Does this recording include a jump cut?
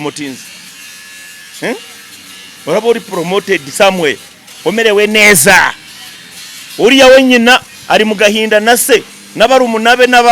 no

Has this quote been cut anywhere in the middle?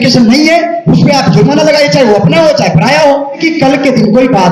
yes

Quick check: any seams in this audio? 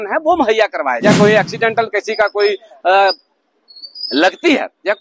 yes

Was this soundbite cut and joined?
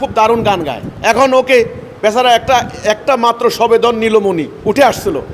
no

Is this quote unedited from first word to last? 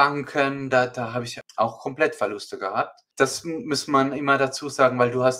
no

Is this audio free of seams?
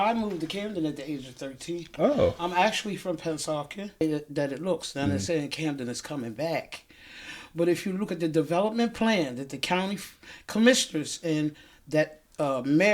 no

